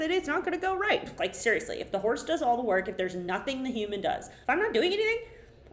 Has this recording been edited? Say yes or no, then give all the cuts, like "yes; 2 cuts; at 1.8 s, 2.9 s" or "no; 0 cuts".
yes; 2 cuts; at 1.1 s, 4.3 s